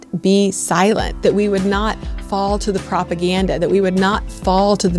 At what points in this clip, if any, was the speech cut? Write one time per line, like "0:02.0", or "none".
none